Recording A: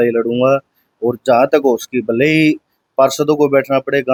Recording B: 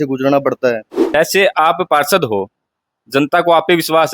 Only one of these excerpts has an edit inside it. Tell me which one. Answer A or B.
B